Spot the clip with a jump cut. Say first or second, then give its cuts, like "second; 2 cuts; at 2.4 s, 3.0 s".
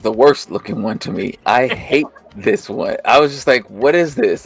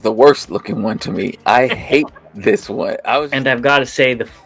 second; 1 cut; at 3.2 s